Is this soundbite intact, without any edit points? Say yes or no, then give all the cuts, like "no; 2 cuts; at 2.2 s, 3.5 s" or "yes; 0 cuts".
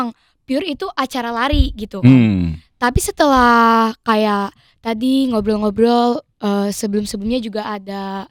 yes; 0 cuts